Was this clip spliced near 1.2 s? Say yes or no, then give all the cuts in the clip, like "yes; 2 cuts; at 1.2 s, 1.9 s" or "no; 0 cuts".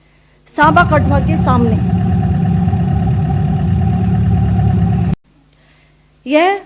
no; 1 cut; at 5.2 s